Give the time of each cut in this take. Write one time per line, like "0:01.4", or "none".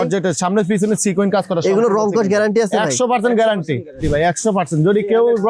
0:04.0